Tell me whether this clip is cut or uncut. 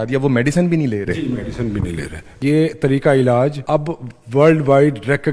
cut